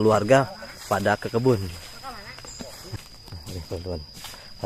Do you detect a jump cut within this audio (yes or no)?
yes